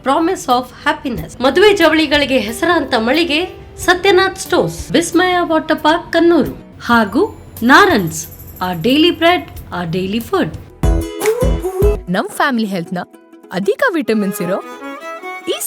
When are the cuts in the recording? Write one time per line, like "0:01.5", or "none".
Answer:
0:10.7